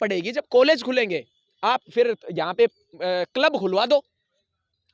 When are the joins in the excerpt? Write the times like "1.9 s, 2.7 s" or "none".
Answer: none